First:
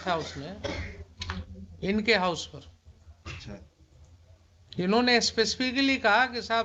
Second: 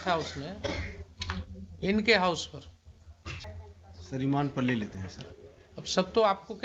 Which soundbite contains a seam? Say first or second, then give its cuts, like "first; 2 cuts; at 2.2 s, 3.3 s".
second; 1 cut; at 3.4 s